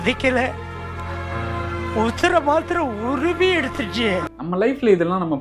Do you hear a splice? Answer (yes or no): yes